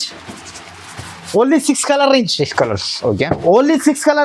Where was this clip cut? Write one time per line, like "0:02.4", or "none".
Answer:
none